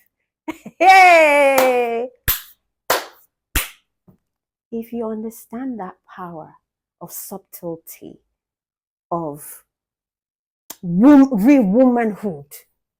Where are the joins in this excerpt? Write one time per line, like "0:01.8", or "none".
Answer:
none